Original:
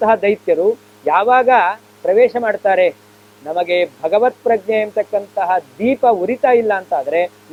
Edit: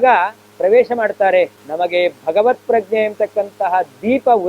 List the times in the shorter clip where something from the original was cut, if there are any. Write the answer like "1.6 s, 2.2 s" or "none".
1.6 s